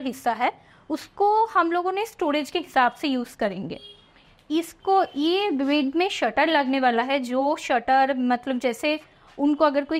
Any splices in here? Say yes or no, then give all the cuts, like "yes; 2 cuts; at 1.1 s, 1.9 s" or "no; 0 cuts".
no; 0 cuts